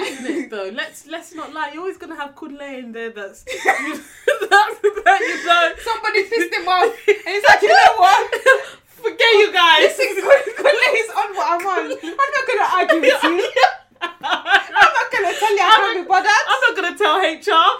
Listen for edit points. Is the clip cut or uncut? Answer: uncut